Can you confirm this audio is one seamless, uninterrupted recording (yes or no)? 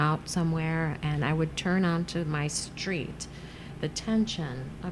yes